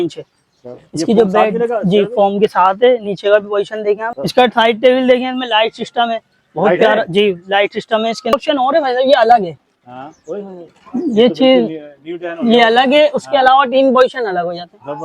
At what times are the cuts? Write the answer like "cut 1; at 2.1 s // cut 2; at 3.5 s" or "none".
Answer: cut 1; at 4.1 s // cut 2; at 8.3 s

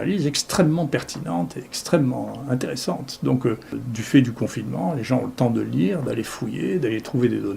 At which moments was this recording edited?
cut 1; at 3.8 s

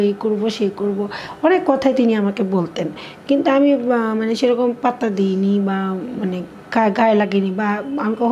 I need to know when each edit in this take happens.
none

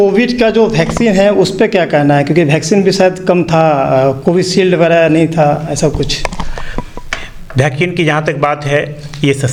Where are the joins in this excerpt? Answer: none

